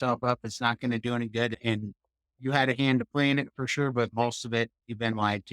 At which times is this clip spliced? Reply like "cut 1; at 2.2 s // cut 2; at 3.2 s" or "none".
cut 1; at 1.6 s

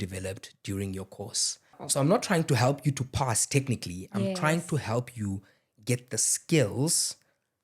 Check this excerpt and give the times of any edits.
cut 1; at 1.8 s

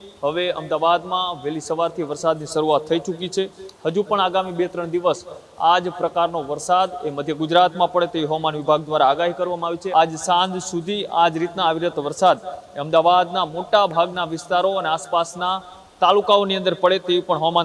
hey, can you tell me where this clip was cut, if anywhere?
cut 1; at 9.8 s

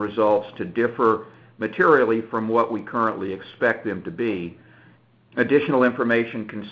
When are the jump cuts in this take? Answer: cut 1; at 3.4 s

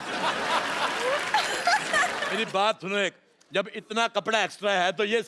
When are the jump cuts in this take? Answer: cut 1; at 2.2 s

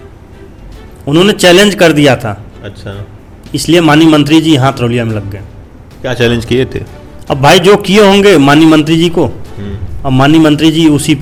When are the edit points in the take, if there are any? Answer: none

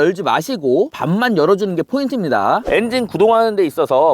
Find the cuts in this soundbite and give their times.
cut 1; at 2.6 s

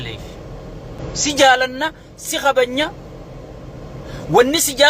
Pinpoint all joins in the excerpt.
cut 1; at 1.0 s

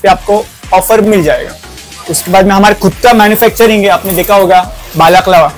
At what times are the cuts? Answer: none

